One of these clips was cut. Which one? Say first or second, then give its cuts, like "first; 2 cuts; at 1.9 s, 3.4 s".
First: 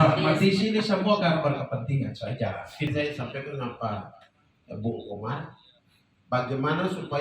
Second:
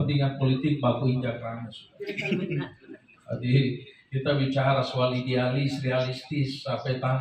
first; 1 cut; at 2.9 s